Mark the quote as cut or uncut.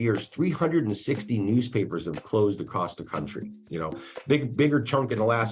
uncut